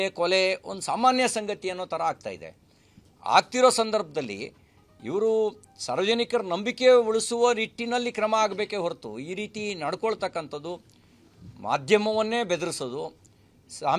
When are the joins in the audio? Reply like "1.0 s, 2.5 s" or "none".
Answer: 5.7 s